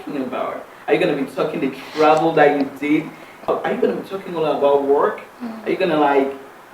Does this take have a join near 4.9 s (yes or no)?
no